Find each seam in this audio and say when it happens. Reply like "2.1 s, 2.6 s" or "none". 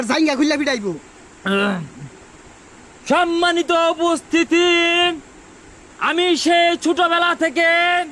none